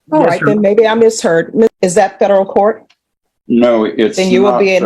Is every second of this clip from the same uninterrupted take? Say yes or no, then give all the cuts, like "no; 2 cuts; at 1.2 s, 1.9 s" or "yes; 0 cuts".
no; 1 cut; at 1.8 s